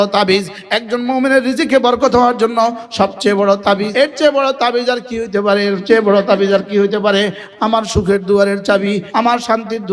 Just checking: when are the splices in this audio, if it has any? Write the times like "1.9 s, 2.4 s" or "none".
3.9 s, 7.5 s, 9.1 s